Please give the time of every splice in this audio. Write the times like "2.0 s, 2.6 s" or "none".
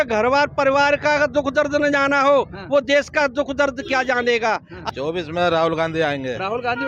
4.7 s